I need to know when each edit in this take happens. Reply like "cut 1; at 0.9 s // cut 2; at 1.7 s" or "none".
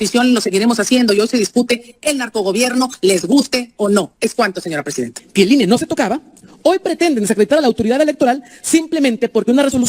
cut 1; at 5.2 s